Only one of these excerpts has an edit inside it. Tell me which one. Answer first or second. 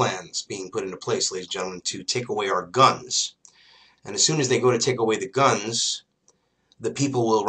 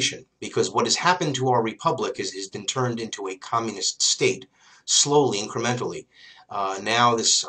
first